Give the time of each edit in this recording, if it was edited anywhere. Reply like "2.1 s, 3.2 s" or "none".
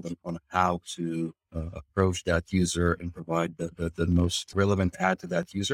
4.4 s